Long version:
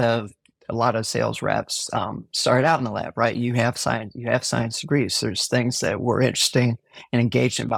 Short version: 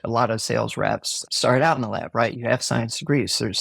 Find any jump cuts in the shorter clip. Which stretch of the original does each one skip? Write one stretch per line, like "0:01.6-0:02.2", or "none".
0:01.8-0:02.2
0:03.4-0:04.1